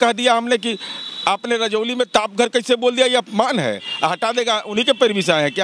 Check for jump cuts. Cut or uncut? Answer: uncut